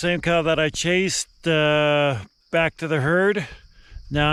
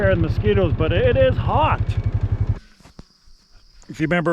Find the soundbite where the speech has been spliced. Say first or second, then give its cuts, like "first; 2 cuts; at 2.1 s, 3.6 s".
second; 1 cut; at 2.6 s